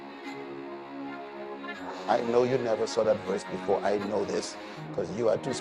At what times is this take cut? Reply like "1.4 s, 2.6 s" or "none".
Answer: 2.0 s